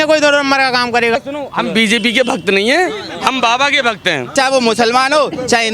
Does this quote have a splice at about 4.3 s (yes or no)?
yes